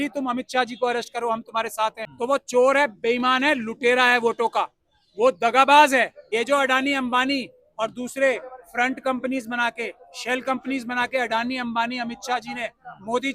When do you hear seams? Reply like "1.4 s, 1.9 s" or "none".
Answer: 2.1 s, 6.2 s